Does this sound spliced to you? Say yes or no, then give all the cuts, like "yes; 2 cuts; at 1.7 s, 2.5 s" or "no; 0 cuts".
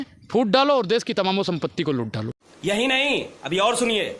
no; 0 cuts